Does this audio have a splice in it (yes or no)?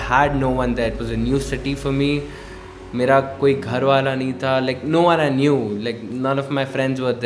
no